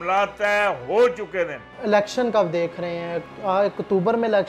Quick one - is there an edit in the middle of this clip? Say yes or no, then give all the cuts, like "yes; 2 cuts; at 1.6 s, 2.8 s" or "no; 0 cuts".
no; 0 cuts